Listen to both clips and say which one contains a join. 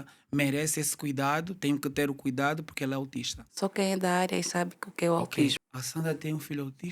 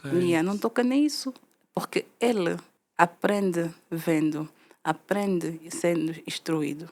first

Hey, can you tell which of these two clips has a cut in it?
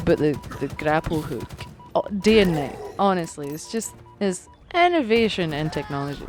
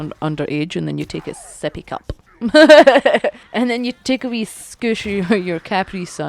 second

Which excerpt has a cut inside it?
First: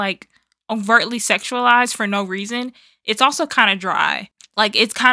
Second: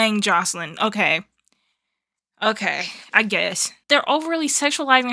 second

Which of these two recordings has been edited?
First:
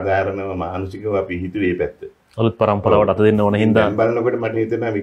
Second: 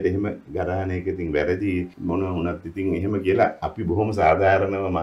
second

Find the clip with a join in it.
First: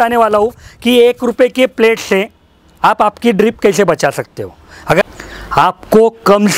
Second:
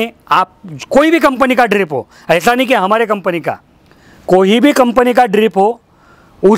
first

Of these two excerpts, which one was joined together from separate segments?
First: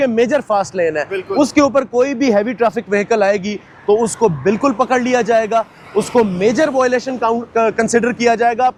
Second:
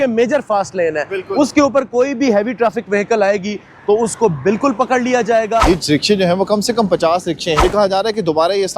second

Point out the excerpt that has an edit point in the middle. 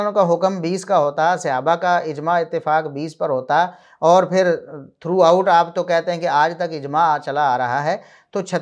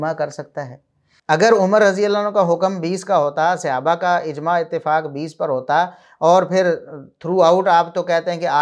second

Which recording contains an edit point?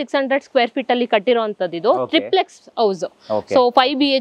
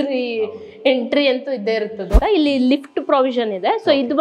second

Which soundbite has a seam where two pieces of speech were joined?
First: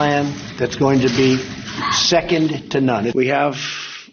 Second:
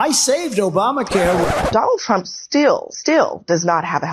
second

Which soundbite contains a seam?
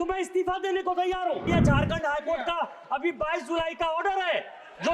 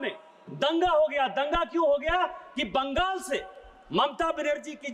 first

